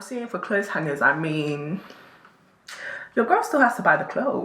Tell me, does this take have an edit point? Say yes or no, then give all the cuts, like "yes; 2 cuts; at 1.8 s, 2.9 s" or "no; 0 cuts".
no; 0 cuts